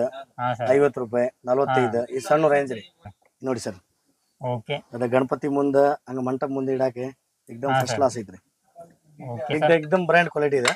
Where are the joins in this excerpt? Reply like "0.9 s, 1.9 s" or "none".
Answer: 3.1 s, 9.5 s